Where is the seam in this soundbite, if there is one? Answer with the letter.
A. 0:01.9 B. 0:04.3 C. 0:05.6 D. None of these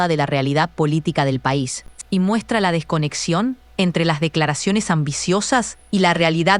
A